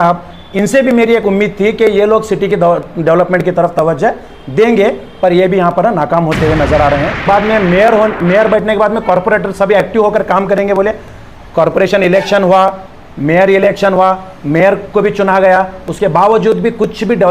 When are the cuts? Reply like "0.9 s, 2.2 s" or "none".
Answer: 7.2 s